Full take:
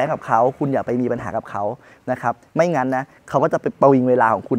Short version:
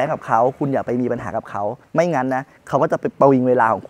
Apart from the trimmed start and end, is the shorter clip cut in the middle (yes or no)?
yes